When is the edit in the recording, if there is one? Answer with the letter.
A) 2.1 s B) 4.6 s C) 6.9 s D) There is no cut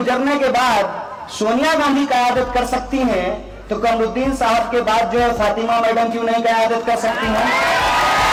D